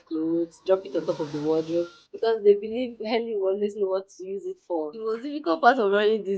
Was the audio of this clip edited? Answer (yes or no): yes